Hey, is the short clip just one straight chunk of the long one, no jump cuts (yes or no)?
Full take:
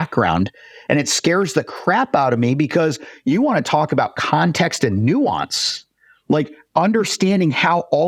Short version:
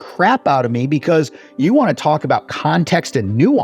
yes